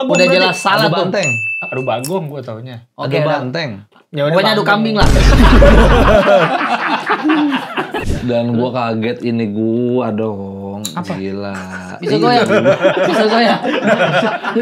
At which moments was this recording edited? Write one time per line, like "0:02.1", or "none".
0:08.1